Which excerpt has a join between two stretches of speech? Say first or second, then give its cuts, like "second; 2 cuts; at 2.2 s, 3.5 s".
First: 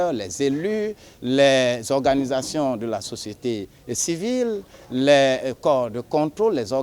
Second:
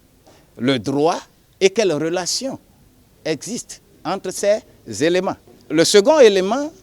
second; 1 cut; at 5.5 s